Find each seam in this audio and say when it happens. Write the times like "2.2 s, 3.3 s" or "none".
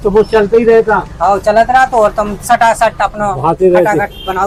none